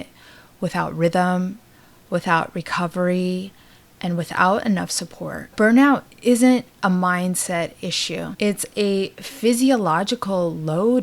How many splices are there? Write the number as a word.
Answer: two